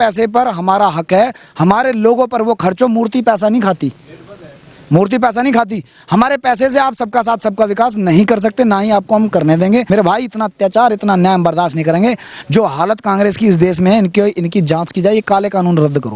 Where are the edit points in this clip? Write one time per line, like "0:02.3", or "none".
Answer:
0:09.9